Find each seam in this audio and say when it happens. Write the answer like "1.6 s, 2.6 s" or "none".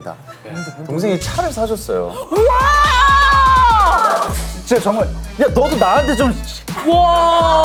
none